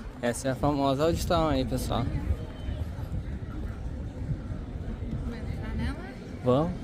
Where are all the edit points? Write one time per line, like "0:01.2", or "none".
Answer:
none